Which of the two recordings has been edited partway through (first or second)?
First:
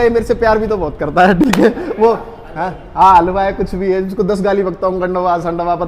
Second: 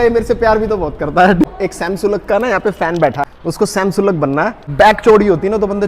second